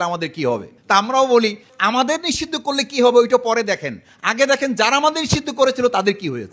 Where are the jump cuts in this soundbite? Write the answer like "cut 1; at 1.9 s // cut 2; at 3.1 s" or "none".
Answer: cut 1; at 1.7 s